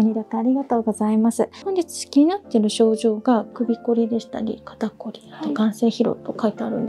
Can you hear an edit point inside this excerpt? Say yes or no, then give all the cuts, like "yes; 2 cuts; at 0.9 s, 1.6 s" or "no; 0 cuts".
yes; 1 cut; at 1.6 s